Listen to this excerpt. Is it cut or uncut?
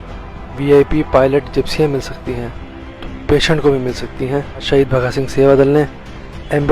cut